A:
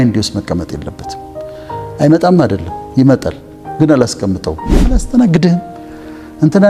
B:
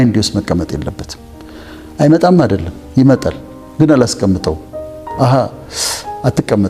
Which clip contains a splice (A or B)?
A